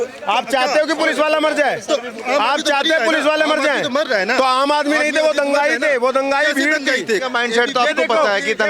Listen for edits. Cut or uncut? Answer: cut